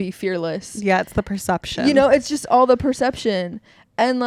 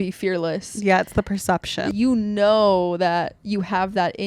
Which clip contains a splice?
second; 1 cut; at 1.8 s

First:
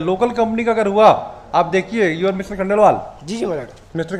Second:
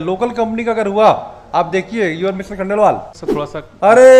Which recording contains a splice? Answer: second; 1 cut; at 3.2 s

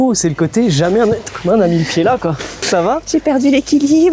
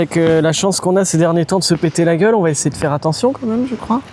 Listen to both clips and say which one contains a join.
first; 1 cut; at 2.6 s

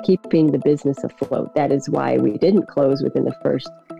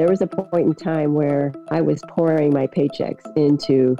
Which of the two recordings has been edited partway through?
second; 1 cut; at 1.6 s

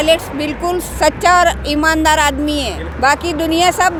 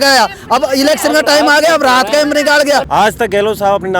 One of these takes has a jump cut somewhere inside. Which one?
second; 1 cut; at 2.9 s

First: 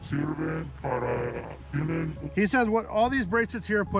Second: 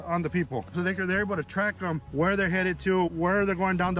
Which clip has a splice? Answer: second; 3 cuts; at 0.7 s, 2.0 s, 3.1 s

